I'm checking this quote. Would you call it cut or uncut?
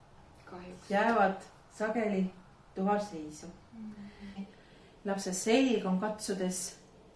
cut